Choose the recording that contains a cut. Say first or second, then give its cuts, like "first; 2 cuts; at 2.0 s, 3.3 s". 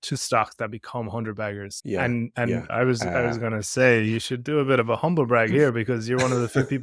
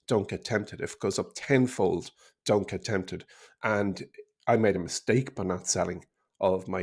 first; 2 cuts; at 1.7 s, 2.7 s